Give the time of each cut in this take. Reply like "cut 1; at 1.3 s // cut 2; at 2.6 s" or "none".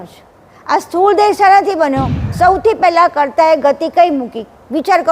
cut 1; at 2.2 s